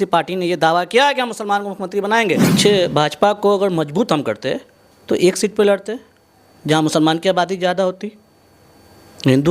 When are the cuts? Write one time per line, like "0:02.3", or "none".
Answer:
0:02.5